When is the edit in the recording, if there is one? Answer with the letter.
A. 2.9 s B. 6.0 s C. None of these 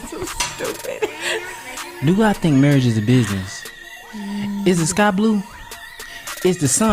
C